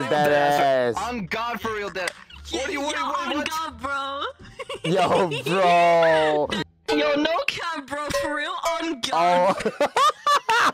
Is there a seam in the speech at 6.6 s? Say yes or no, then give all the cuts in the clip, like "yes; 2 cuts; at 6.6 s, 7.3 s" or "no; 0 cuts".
yes; 1 cut; at 6.6 s